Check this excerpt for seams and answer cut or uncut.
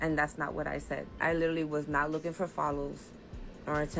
cut